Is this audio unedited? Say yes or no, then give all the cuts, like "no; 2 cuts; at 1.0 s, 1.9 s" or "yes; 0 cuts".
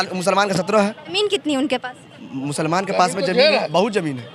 no; 1 cut; at 1.0 s